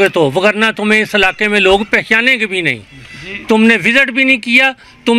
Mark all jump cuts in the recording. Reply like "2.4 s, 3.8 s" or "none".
none